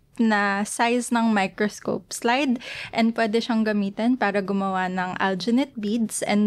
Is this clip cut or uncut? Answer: uncut